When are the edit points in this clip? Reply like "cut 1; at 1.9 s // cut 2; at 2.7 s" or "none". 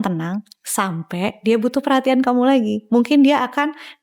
none